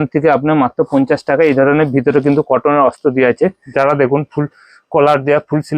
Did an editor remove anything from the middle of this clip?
yes; 1 cut; at 3.6 s

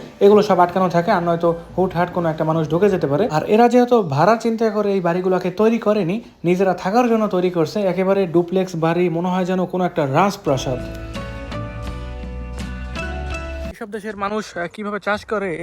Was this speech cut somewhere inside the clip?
yes; 2 cuts; at 3.4 s, 13.7 s

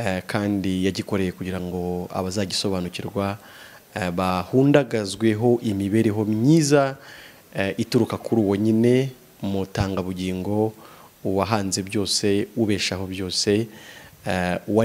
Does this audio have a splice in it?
no; 0 cuts

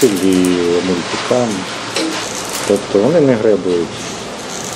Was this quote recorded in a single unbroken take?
yes; 0 cuts

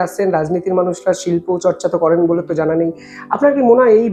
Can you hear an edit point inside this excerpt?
no; 0 cuts

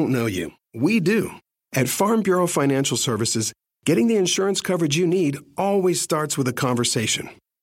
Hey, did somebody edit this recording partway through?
yes; 1 cut; at 1.4 s

